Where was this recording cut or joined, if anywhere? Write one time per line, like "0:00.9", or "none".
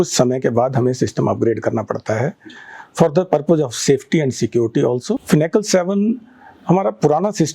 0:05.2

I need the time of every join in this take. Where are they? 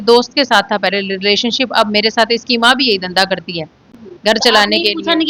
none

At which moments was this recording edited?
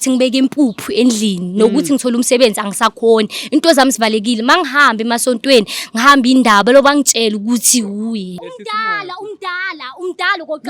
0:08.3

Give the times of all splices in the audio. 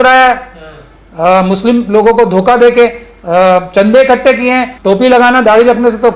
0:04.7

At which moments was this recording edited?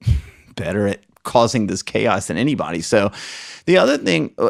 none

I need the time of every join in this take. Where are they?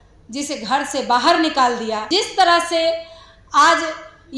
0:02.1

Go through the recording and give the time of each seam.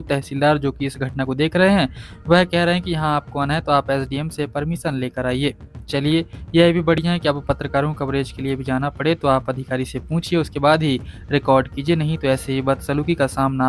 none

